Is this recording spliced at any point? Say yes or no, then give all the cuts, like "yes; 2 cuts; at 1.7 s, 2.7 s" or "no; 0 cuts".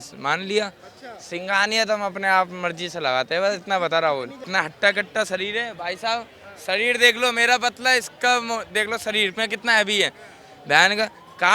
yes; 1 cut; at 4.4 s